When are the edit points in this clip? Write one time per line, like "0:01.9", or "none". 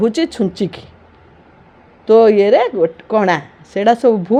none